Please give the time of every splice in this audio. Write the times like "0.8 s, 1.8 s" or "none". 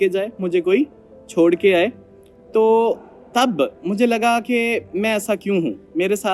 none